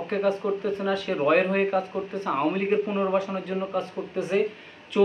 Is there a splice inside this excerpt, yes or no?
no